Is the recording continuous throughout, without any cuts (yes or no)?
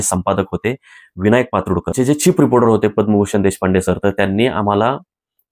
no